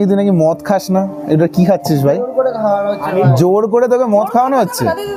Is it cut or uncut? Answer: uncut